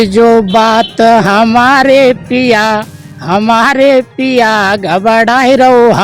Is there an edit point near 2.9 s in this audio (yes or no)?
no